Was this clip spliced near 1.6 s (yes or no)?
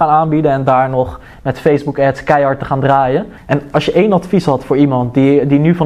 no